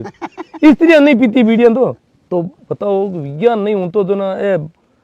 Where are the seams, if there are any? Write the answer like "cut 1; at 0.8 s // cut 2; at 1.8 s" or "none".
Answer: cut 1; at 2.1 s